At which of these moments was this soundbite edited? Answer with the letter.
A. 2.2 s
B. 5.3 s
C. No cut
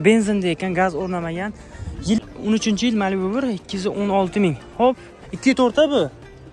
A